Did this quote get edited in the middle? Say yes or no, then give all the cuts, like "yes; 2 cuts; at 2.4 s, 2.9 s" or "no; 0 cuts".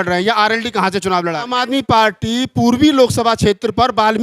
yes; 1 cut; at 1.5 s